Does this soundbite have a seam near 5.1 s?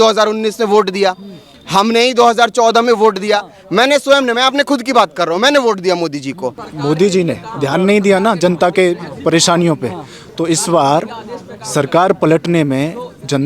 no; 1 cut; at 6.7 s

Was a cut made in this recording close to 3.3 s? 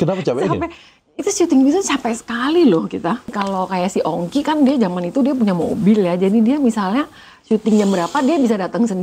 yes; 1 cut; at 3.3 s

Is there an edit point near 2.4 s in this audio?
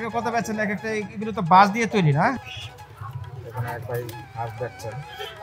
yes; 1 cut; at 2.4 s

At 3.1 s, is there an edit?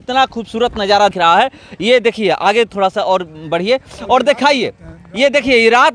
no; 1 cut; at 1.1 s

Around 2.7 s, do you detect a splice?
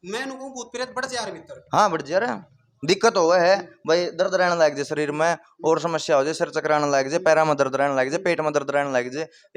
no; 0 cuts

